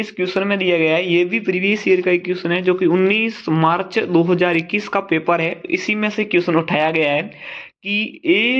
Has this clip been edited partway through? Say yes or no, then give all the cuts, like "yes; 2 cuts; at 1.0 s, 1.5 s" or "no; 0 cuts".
no; 0 cuts